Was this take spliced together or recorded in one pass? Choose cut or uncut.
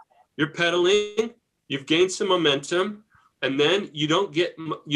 uncut